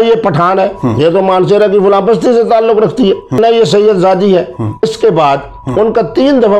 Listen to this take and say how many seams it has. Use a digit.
2